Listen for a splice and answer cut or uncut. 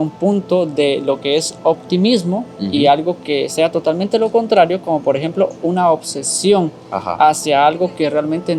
uncut